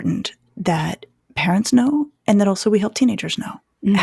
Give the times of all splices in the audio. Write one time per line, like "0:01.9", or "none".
none